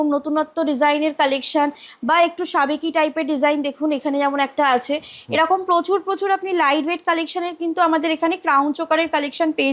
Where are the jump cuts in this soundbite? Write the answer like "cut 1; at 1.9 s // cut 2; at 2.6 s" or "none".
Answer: none